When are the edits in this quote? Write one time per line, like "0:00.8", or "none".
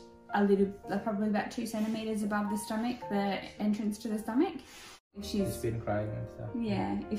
0:05.2